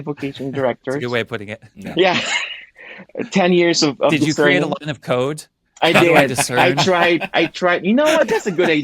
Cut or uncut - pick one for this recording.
uncut